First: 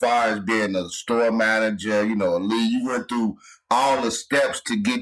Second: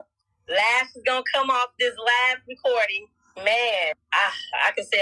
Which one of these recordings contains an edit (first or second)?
second